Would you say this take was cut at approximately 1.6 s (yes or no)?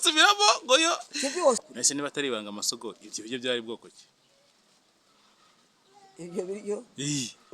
yes